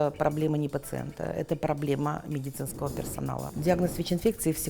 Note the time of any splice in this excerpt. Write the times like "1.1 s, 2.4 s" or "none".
3.5 s